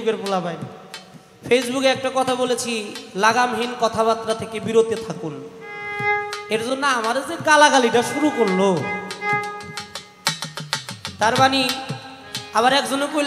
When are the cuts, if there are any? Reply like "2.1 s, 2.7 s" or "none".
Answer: none